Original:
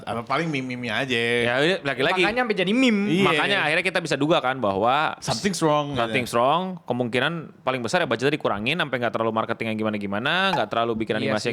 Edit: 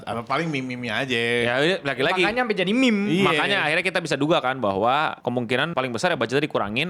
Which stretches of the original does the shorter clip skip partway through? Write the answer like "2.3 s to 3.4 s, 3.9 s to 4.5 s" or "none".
5.3 s to 7.2 s

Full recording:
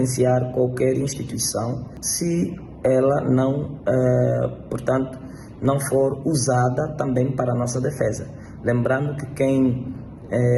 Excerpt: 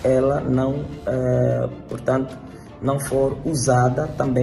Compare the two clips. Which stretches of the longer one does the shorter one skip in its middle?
none

